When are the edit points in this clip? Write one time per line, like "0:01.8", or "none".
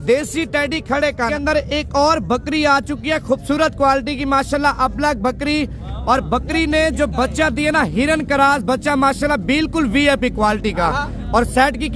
0:01.3